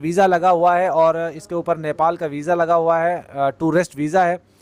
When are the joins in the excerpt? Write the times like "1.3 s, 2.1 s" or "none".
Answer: none